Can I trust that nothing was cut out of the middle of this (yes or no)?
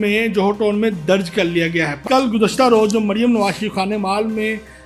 no